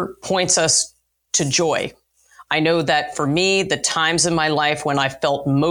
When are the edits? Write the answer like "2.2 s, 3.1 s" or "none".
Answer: none